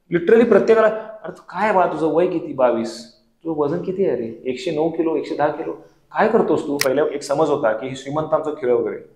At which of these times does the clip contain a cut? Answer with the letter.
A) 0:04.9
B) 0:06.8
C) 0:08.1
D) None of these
B